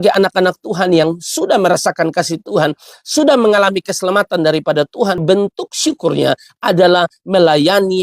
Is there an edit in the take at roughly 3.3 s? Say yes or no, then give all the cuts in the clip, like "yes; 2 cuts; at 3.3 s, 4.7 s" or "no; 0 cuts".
no; 1 cut; at 5.2 s